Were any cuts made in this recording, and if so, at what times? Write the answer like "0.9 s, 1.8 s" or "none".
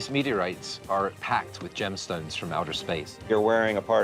1.2 s, 3.3 s